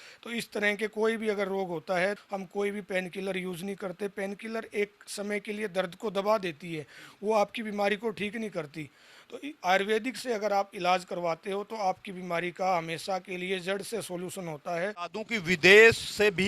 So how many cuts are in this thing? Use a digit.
2